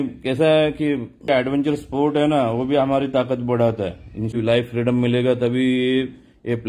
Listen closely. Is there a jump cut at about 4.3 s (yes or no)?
yes